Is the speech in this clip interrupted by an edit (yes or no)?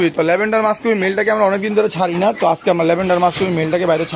no